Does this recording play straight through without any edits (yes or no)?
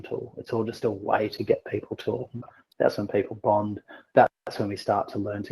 no